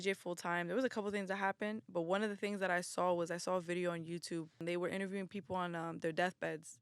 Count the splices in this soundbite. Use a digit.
1